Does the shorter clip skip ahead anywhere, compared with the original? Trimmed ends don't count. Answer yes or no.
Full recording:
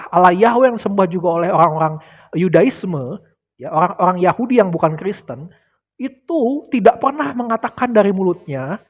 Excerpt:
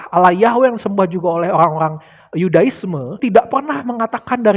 yes